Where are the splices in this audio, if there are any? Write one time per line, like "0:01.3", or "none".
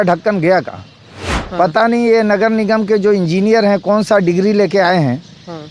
0:01.4